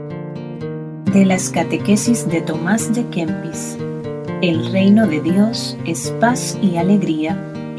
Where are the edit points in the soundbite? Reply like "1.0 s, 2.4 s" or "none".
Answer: 1.0 s